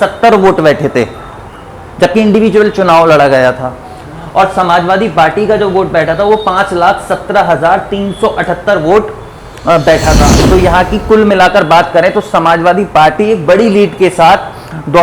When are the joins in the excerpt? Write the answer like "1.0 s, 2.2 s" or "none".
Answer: 10.4 s